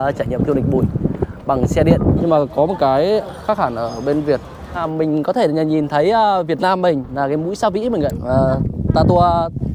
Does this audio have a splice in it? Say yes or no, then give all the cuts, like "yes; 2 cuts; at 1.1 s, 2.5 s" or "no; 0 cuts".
yes; 3 cuts; at 2.2 s, 4.7 s, 8.2 s